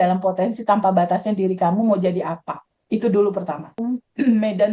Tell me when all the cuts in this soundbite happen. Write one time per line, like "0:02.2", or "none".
0:03.8